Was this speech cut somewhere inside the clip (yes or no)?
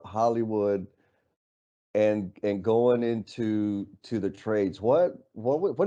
no